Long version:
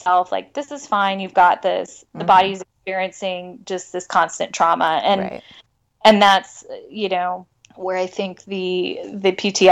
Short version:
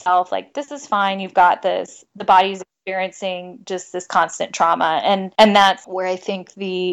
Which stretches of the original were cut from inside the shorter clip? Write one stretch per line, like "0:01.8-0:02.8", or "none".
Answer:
0:05.3-0:05.9
0:06.5-0:07.7